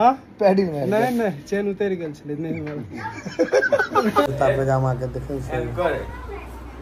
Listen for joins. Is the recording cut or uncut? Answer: cut